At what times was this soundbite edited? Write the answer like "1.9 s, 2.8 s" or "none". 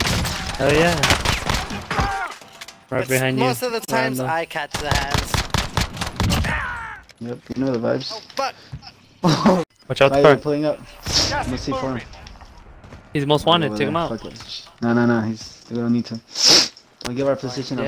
9.8 s